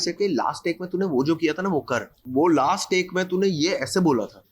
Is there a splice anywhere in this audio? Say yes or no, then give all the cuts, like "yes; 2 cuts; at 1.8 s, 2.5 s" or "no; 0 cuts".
yes; 1 cut; at 2.2 s